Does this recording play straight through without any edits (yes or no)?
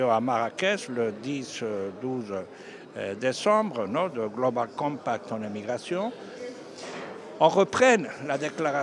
yes